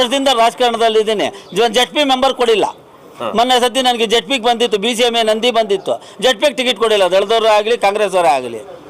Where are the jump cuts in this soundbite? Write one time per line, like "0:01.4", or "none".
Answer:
none